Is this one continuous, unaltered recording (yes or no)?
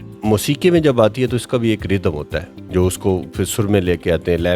no